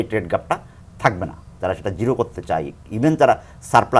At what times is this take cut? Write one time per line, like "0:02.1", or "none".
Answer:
none